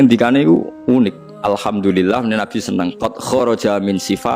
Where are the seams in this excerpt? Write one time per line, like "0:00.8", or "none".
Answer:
0:01.3